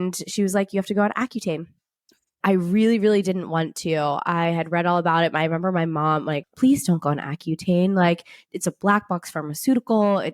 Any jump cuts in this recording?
yes; 2 cuts; at 2.4 s, 6.5 s

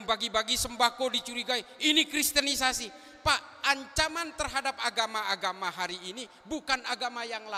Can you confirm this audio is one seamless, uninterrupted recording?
yes; 0 cuts

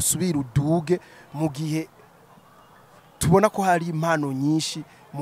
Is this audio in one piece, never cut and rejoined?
yes; 0 cuts

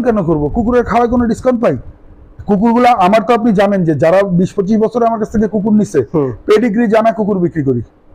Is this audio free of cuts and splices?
yes; 0 cuts

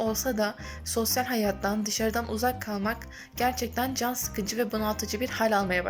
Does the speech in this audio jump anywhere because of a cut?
no; 0 cuts

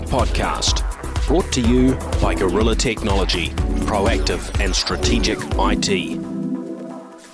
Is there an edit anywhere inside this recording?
no; 0 cuts

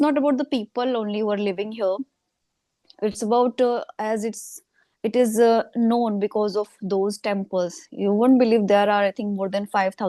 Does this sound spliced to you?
no; 0 cuts

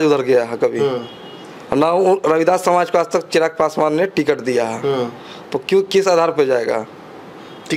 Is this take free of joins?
yes; 0 cuts

